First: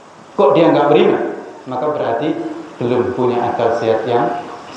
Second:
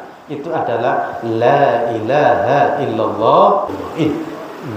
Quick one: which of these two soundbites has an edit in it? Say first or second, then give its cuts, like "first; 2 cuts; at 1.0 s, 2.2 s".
second; 1 cut; at 3.7 s